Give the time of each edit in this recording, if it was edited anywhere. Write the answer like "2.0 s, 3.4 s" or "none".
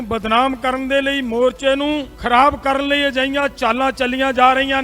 2.1 s